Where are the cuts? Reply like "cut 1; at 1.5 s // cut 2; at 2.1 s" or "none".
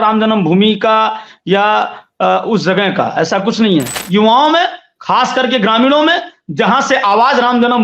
cut 1; at 4.0 s